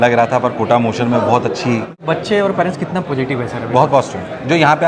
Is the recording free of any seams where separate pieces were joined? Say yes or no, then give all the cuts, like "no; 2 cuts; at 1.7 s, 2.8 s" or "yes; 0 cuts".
no; 1 cut; at 1.9 s